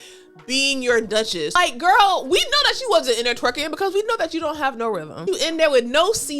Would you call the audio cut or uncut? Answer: cut